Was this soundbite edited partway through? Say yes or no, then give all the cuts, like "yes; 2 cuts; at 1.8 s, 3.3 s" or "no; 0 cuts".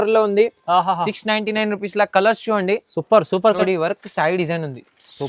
yes; 1 cut; at 3.6 s